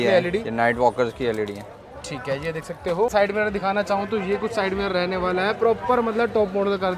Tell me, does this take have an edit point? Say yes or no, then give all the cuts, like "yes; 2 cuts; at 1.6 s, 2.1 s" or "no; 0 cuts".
no; 0 cuts